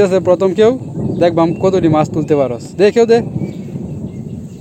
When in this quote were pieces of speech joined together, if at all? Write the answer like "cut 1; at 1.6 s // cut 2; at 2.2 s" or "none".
none